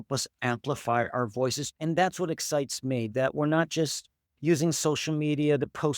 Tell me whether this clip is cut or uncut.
cut